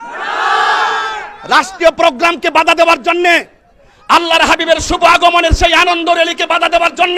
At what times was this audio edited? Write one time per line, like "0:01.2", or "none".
none